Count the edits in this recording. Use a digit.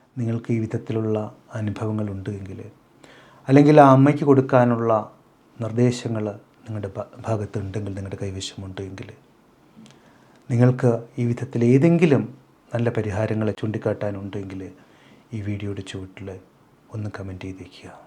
1